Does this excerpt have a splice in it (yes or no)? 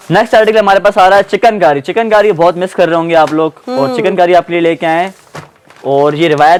no